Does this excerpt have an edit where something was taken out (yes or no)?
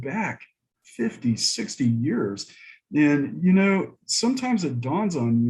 no